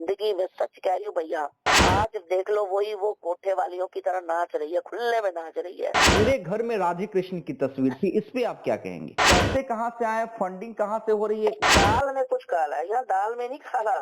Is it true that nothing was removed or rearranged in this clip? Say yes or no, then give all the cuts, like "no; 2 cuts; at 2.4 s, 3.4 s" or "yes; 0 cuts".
no; 4 cuts; at 1.7 s, 6.1 s, 9.2 s, 11.6 s